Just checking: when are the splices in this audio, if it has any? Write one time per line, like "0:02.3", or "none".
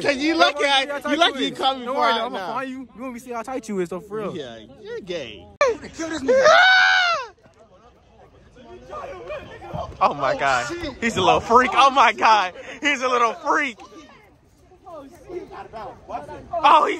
0:05.6